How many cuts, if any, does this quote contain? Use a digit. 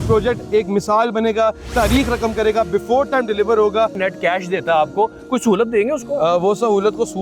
1